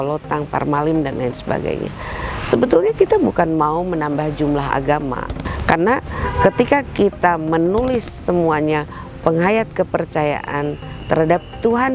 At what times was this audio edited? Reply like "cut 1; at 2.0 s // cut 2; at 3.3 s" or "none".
cut 1; at 5.4 s